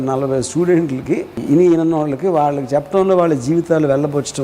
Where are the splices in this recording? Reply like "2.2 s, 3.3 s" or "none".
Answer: 1.4 s